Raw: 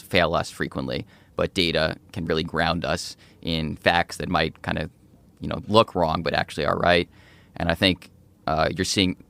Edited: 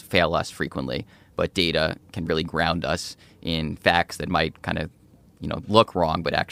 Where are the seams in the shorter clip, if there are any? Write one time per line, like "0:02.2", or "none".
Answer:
none